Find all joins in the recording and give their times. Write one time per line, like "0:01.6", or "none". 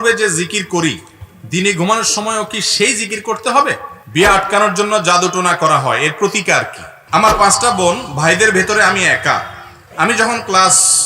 0:03.9
0:07.0